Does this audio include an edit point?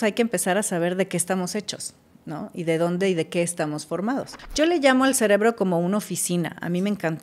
yes; 1 cut; at 4.4 s

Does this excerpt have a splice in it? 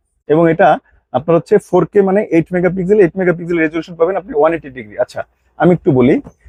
no; 0 cuts

